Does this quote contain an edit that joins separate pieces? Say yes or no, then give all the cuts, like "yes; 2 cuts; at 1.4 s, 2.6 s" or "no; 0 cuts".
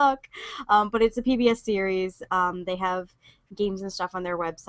no; 0 cuts